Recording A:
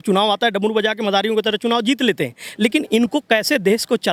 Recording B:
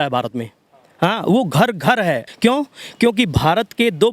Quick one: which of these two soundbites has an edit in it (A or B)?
B